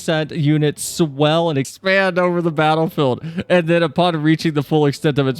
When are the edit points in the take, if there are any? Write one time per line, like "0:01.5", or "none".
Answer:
0:01.7